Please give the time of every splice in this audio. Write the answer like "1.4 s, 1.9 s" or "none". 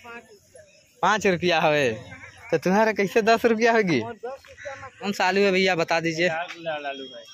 5.1 s

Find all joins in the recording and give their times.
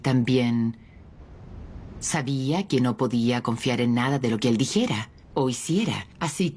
5.5 s

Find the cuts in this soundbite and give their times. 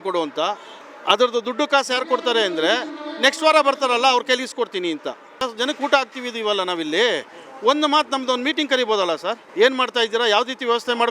5.4 s, 9.4 s

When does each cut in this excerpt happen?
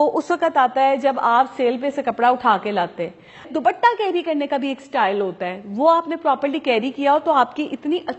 3.5 s

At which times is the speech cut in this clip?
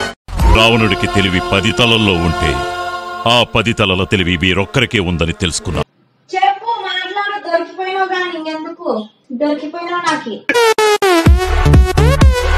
9.2 s

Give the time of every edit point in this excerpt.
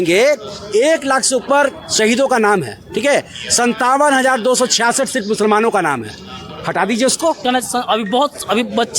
7.4 s

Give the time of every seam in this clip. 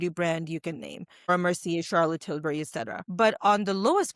1.3 s, 3.0 s

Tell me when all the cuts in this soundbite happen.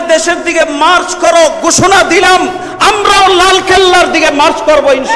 none

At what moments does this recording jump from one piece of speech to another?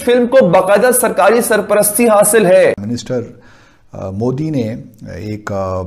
2.9 s

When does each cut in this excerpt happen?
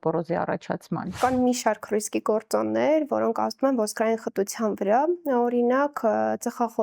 1.1 s

